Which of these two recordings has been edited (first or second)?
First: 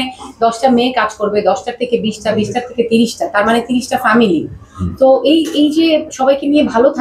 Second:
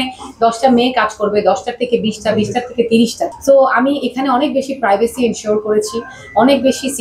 second